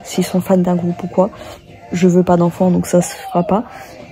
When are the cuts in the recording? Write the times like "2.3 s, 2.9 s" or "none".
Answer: none